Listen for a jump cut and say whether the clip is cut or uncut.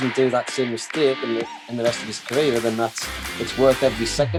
uncut